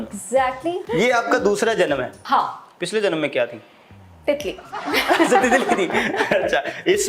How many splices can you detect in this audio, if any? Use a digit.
2